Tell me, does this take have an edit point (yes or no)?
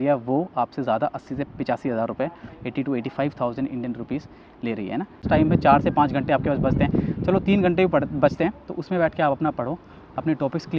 yes